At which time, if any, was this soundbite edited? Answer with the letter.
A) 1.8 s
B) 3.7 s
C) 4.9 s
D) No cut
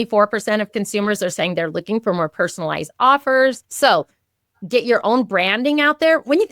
B